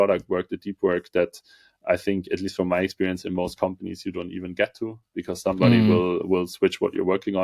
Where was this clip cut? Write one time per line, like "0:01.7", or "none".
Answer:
none